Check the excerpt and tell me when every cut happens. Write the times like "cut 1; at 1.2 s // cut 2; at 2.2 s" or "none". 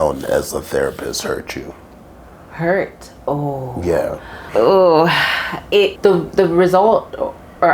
cut 1; at 4.3 s // cut 2; at 5.9 s